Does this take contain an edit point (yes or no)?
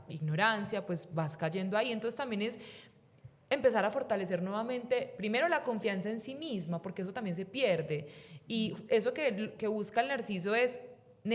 no